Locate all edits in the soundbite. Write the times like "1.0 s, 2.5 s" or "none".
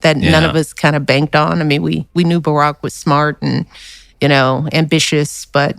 2.4 s